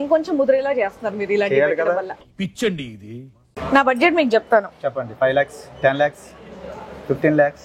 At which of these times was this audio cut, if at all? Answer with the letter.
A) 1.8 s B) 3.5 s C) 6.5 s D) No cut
B